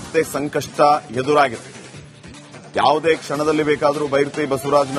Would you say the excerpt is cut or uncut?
uncut